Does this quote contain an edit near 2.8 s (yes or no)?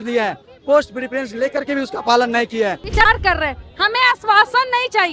yes